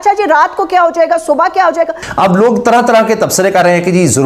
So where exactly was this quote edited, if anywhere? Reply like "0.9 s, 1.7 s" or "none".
2.0 s